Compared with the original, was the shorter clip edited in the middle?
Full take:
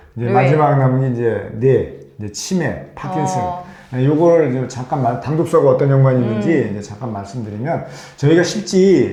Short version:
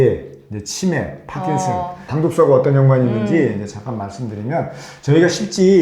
yes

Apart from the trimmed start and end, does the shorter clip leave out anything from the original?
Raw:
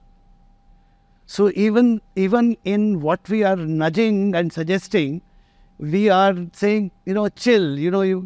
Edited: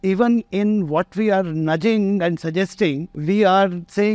yes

